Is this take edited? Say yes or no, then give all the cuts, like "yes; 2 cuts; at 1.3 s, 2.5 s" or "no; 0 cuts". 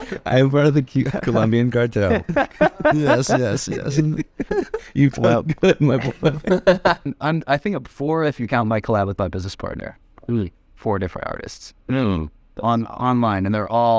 yes; 1 cut; at 7.1 s